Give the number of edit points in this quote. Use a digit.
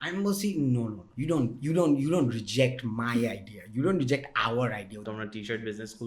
2